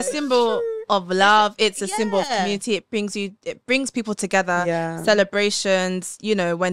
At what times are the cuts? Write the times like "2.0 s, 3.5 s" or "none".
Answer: none

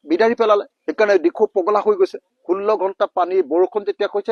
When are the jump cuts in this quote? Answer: none

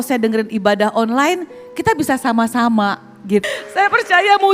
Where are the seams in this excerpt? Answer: 3.4 s

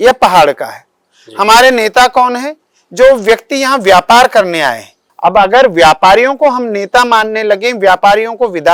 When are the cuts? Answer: none

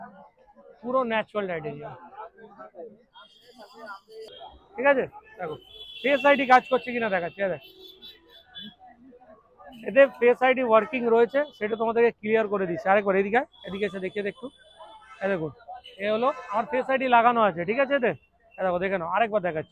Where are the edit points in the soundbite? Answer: 4.3 s

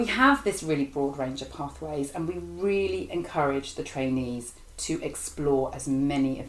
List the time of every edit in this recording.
none

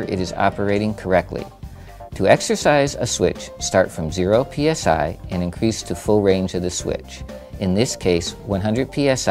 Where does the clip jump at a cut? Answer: none

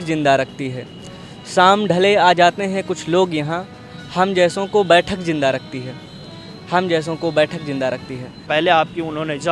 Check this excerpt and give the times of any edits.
8.4 s

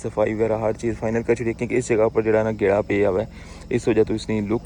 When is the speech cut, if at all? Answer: none

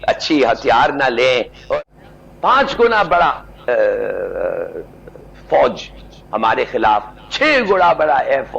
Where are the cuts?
1.8 s

